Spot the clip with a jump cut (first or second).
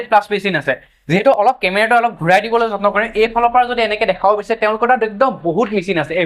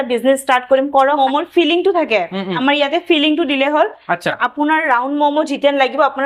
second